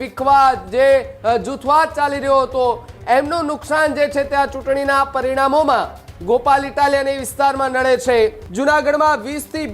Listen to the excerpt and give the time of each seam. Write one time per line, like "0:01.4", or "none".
0:08.4